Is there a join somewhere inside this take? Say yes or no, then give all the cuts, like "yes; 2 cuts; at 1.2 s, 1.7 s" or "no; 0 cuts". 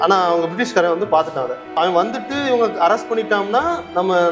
yes; 1 cut; at 1.7 s